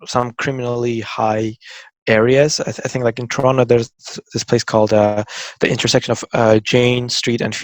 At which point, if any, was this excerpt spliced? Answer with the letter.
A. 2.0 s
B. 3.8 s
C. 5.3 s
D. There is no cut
D